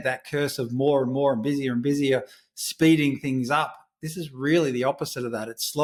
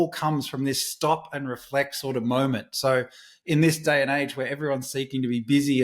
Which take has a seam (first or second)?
second